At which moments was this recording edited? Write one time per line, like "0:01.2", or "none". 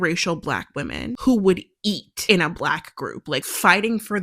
0:01.1
0:02.1
0:03.5